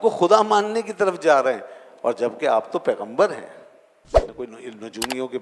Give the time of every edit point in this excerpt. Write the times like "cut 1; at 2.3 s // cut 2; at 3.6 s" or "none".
cut 1; at 4.4 s